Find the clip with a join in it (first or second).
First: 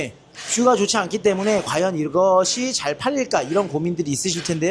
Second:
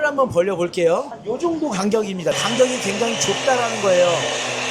second